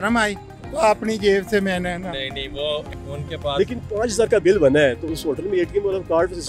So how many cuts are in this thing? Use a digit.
1